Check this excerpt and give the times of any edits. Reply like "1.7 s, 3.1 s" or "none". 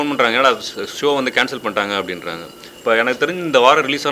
2.6 s